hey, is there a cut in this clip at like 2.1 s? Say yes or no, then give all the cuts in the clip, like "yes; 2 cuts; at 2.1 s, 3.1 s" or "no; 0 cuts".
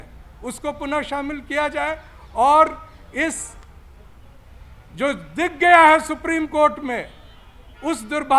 no; 0 cuts